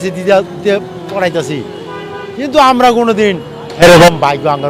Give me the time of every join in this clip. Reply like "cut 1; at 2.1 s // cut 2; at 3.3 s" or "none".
none